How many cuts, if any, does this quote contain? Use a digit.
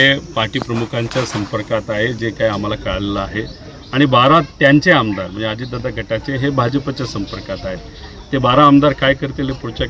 0